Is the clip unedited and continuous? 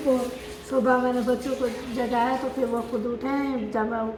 yes; 0 cuts

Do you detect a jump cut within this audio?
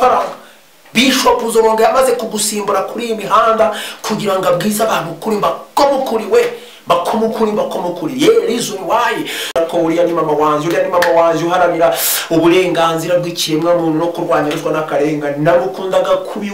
yes; 1 cut; at 9.5 s

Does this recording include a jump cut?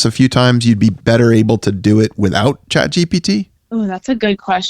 yes; 1 cut; at 1.0 s

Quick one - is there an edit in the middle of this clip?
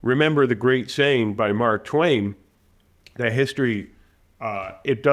no; 0 cuts

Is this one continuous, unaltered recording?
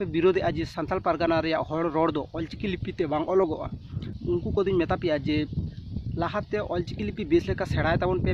yes; 0 cuts

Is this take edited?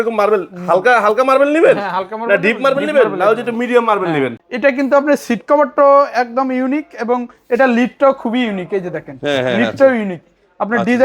yes; 1 cut; at 4.4 s

